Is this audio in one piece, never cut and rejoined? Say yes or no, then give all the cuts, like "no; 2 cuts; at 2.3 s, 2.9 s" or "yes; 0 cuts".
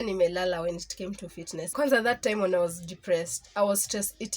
no; 1 cut; at 1.7 s